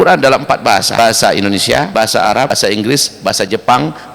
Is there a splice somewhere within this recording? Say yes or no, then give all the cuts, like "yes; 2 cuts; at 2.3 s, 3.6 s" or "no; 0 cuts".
yes; 2 cuts; at 0.9 s, 2.3 s